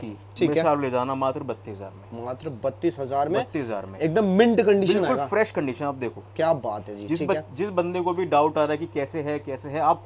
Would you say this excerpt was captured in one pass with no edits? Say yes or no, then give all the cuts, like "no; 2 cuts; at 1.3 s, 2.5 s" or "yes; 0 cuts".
yes; 0 cuts